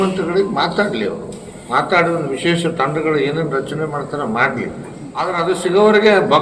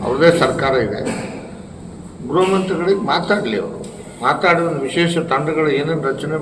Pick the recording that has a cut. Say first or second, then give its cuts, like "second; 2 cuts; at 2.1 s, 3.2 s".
first; 1 cut; at 5.3 s